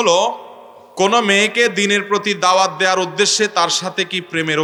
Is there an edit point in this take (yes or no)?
no